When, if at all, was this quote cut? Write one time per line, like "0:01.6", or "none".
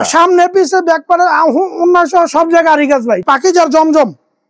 0:03.2

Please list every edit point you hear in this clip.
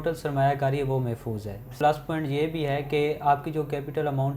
0:01.7

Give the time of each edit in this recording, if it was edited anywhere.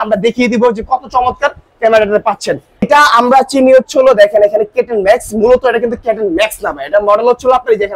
0:02.9

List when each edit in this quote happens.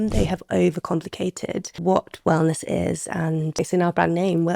0:01.7
0:03.5

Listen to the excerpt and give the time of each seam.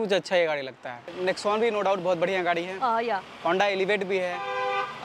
0:01.1

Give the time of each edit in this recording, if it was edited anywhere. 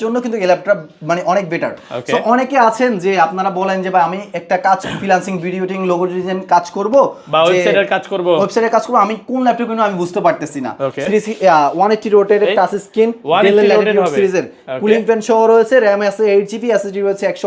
0:11.0

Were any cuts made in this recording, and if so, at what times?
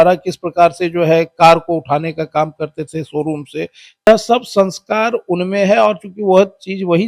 0:04.1

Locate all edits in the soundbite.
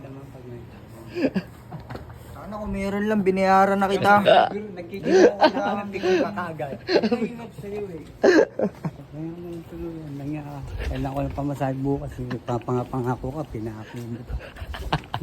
0:09.0

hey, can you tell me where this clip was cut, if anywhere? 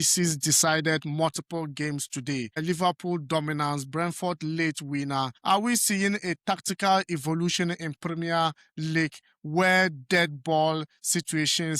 0:05.4

